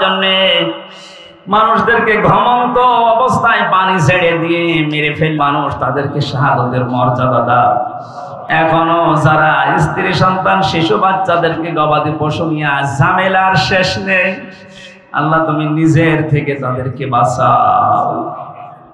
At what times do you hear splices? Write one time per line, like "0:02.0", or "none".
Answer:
0:05.4